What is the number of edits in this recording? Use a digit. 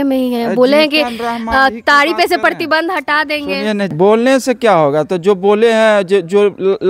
1